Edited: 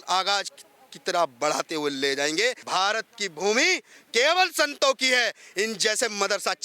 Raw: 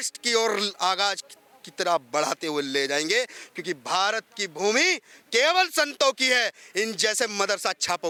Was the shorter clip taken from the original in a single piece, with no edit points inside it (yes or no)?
no